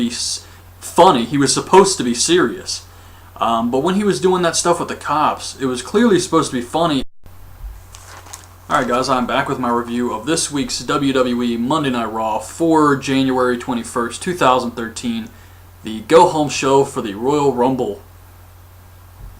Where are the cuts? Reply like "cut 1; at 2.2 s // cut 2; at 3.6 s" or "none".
none